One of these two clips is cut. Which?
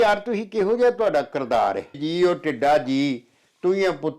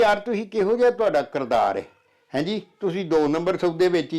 first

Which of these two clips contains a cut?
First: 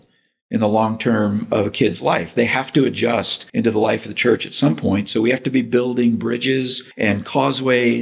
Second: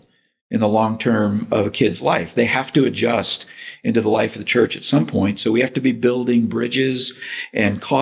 first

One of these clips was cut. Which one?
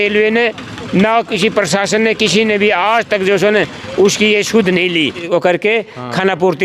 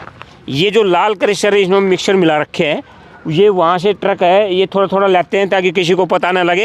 first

